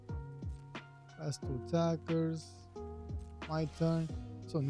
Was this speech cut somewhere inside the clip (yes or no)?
yes